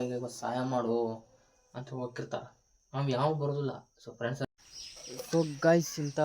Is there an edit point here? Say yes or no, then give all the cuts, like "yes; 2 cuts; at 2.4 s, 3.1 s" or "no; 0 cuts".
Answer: yes; 1 cut; at 4.4 s